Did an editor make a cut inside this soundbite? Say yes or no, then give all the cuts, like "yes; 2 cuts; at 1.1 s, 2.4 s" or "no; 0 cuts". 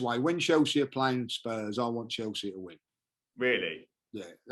no; 0 cuts